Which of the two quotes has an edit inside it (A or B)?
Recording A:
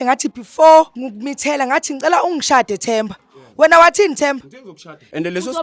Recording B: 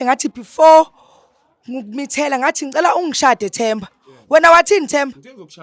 A